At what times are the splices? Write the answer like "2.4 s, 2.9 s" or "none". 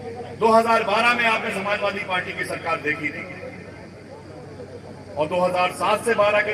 none